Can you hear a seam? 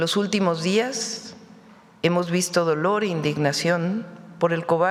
no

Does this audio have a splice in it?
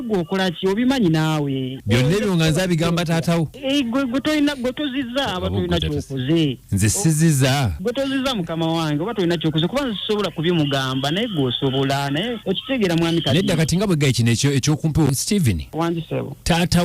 yes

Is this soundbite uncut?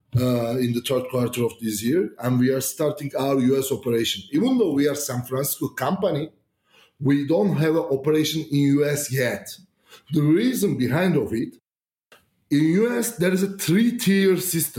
yes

